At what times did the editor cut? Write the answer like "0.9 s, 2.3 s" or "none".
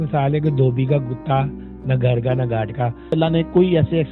3.1 s